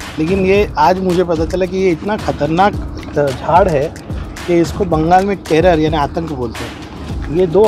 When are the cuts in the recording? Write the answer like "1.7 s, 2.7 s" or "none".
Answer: none